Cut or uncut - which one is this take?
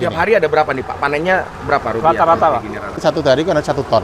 cut